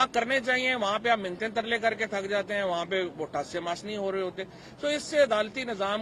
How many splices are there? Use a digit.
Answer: 0